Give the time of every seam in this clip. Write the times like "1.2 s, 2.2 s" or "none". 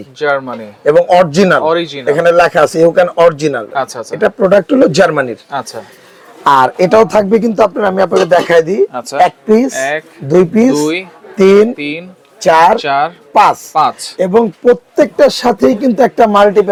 none